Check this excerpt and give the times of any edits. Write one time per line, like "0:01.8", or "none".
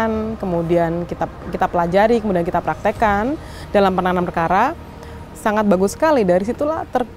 none